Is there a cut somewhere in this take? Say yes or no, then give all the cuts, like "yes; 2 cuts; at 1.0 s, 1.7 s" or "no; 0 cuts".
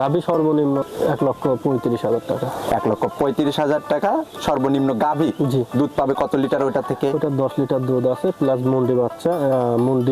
yes; 1 cut; at 0.9 s